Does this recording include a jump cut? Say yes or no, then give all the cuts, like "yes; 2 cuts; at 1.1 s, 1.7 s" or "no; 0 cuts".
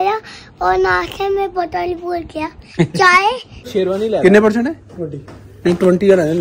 yes; 1 cut; at 3.7 s